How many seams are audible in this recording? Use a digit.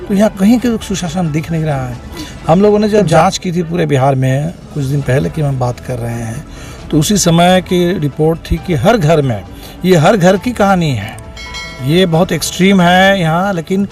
0